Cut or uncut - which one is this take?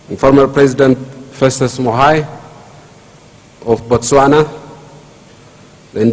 cut